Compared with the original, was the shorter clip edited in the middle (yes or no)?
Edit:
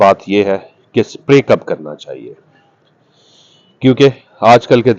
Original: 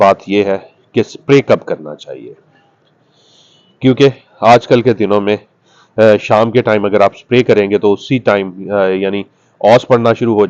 no